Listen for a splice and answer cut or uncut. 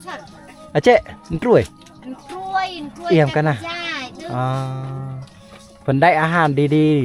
uncut